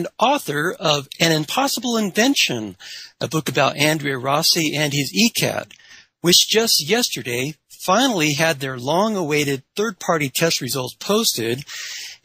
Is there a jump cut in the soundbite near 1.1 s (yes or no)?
yes